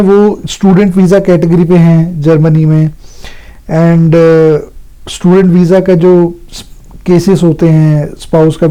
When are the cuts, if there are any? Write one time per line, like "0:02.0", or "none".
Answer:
none